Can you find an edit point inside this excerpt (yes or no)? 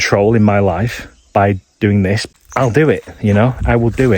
yes